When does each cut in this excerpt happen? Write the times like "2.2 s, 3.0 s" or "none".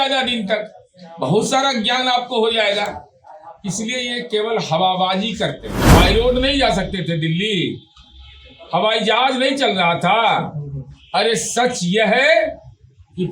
5.7 s